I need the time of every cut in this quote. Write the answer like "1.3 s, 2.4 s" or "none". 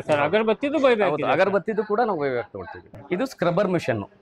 2.8 s